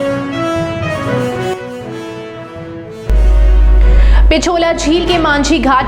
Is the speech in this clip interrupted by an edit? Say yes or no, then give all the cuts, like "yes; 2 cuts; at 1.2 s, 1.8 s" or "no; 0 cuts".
no; 0 cuts